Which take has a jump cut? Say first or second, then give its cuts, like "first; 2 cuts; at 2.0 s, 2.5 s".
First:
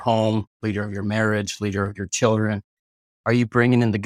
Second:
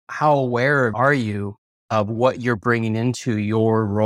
second; 1 cut; at 0.9 s